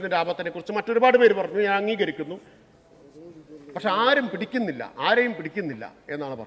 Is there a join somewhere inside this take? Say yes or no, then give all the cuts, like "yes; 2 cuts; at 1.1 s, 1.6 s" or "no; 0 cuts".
no; 0 cuts